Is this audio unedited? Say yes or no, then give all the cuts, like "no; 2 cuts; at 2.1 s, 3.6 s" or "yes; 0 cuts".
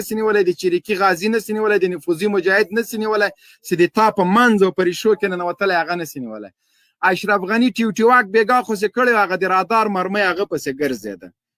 no; 1 cut; at 6.7 s